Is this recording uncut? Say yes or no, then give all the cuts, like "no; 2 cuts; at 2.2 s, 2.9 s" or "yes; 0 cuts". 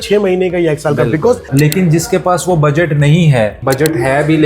no; 2 cuts; at 1.5 s, 3.6 s